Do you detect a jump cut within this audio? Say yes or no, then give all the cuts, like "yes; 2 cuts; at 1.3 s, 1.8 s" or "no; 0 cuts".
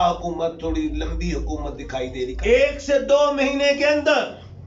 yes; 1 cut; at 2.4 s